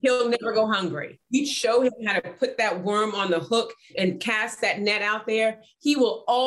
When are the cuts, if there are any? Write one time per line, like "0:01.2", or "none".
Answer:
0:01.1